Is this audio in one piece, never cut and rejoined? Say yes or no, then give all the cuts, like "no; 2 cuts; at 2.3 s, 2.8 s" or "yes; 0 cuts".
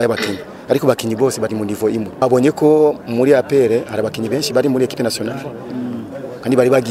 no; 1 cut; at 2.2 s